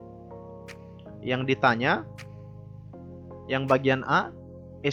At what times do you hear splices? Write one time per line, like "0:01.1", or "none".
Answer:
0:01.2